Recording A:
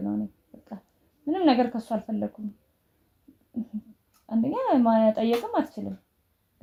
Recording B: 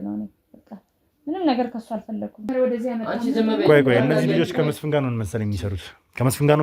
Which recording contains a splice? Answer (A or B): B